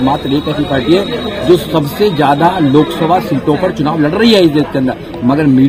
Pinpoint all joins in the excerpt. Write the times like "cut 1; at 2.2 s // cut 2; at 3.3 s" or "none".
none